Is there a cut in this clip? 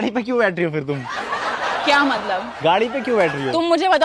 no; 0 cuts

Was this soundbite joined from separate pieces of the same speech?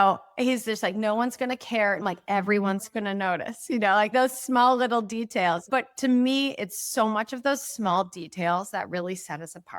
yes; 1 cut; at 5.6 s

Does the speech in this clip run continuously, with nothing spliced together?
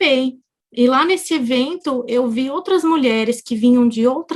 yes; 0 cuts

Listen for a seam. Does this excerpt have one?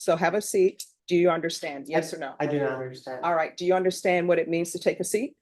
yes; 1 cut; at 0.9 s

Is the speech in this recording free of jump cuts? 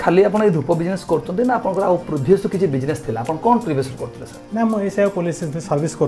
yes; 0 cuts

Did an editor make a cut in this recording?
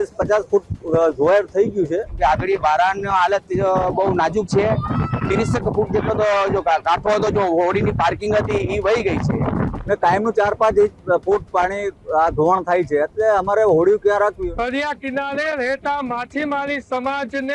yes; 3 cuts; at 2.1 s, 9.7 s, 14.4 s

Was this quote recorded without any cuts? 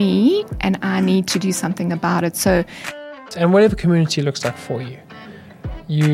no; 1 cut; at 3.2 s

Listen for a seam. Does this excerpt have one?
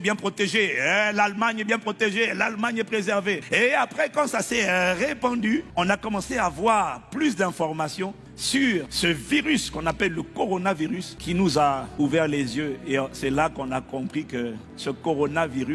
no; 0 cuts

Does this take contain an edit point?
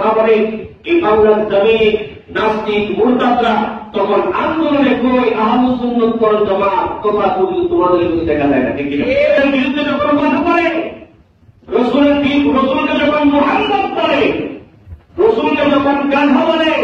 yes; 1 cut; at 9.4 s

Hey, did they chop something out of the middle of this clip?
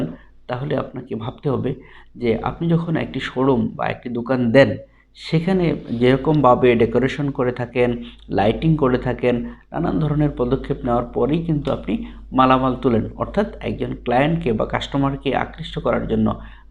no; 0 cuts

